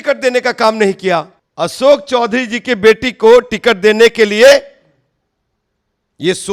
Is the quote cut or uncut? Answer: cut